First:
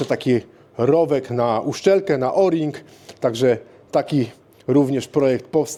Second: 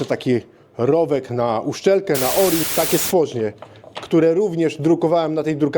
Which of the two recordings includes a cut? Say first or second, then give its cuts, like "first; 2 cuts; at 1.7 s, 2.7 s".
second; 1 cut; at 2.7 s